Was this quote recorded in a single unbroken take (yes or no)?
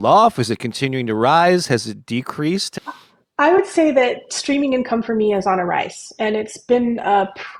yes